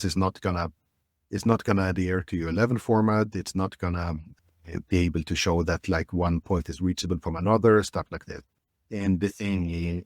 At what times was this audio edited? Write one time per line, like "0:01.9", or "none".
0:04.3
0:08.5